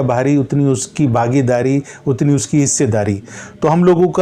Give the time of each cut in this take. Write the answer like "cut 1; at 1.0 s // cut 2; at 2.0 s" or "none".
none